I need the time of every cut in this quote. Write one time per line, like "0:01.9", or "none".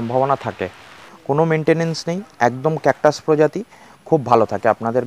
0:01.1